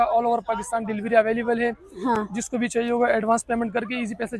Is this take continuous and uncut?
yes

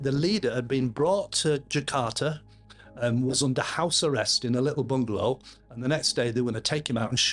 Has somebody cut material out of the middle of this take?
no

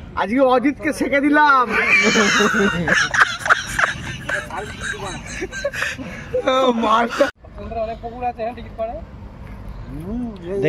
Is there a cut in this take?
no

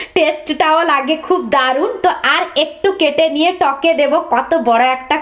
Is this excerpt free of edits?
yes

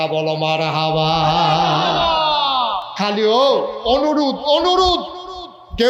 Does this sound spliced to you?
no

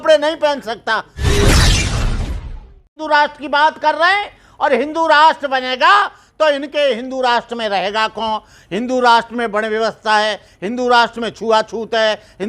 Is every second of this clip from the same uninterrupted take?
no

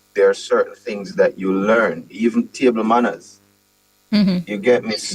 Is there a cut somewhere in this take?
no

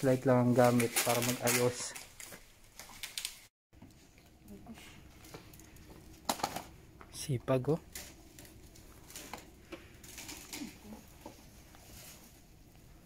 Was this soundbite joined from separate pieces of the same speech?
yes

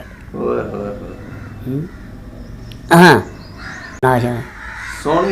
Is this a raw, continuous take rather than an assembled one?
no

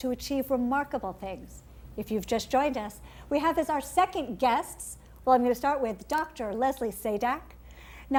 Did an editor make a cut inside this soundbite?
no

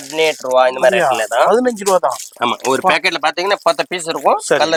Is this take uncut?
yes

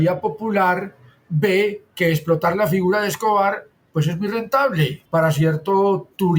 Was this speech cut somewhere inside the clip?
no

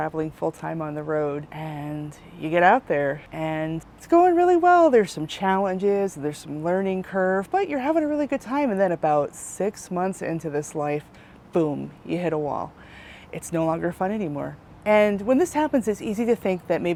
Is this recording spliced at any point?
no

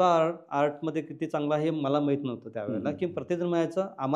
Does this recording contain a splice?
no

